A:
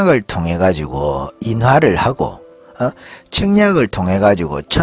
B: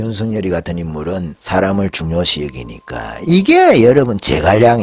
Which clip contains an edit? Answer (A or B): B